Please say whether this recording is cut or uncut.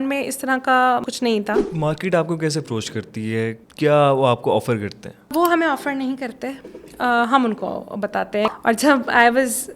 cut